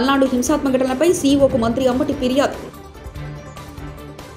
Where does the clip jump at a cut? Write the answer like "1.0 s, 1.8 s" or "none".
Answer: none